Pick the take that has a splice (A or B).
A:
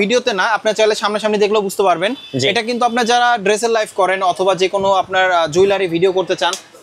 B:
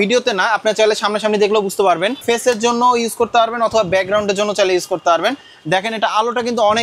B